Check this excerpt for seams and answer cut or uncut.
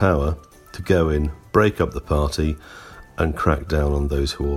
uncut